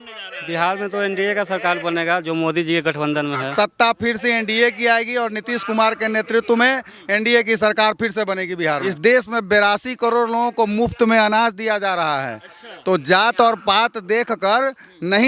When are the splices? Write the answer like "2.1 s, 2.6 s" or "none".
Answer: 3.4 s, 8.9 s